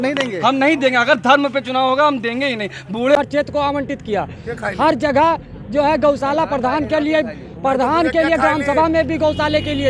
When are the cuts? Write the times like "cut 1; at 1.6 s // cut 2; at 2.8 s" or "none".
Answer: cut 1; at 3.1 s